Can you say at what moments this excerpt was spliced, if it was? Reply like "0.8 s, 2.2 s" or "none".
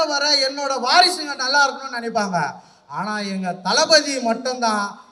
none